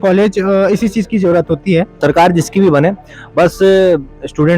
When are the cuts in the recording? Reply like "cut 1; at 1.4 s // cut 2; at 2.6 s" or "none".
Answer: cut 1; at 1.9 s